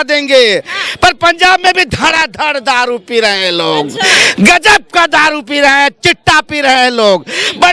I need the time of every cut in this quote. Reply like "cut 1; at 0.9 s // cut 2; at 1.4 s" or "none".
none